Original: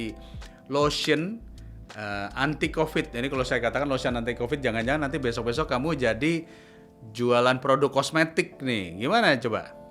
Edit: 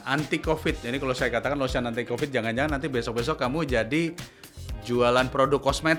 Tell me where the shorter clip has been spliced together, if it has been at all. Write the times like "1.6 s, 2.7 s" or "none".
none